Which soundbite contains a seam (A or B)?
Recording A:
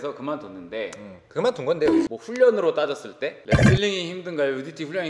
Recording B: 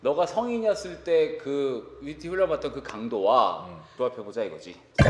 A